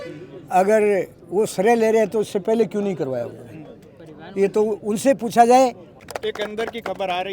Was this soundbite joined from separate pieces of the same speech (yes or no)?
yes